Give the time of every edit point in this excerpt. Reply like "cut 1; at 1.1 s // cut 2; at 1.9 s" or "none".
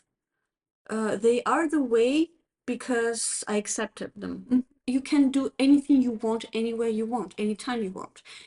cut 1; at 4.7 s